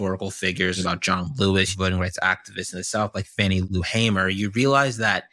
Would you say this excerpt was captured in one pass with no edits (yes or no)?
no